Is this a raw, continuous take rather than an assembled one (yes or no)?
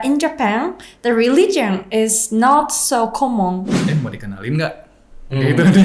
no